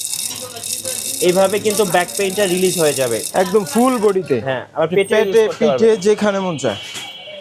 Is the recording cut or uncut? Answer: uncut